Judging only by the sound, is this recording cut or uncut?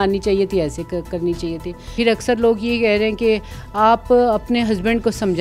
cut